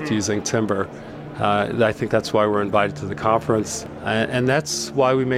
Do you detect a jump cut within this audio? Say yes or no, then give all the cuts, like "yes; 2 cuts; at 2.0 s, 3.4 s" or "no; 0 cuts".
yes; 1 cut; at 3.8 s